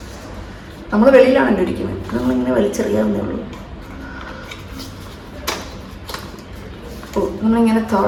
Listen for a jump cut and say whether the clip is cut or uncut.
uncut